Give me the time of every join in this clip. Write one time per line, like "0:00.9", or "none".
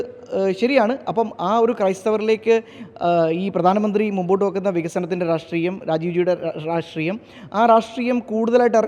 none